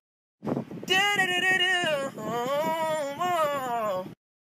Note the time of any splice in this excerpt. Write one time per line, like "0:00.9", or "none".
0:03.5